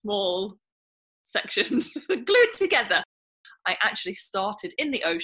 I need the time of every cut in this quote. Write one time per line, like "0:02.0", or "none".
0:03.3